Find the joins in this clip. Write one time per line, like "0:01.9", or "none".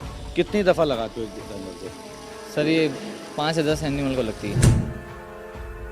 0:04.9